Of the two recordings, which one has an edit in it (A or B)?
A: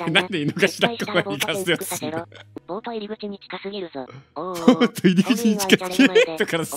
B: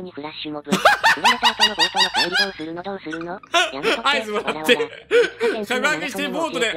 A